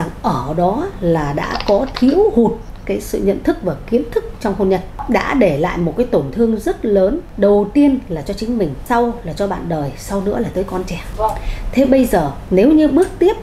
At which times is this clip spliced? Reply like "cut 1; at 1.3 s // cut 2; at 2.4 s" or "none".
cut 1; at 5.0 s // cut 2; at 7.2 s // cut 3; at 8.8 s // cut 4; at 11.0 s // cut 5; at 12.4 s